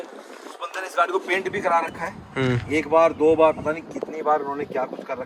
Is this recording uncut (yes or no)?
yes